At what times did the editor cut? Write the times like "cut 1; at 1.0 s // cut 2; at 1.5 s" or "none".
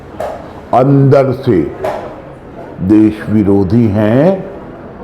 none